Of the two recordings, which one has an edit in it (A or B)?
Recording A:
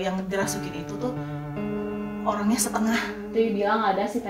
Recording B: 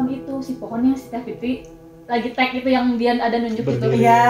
A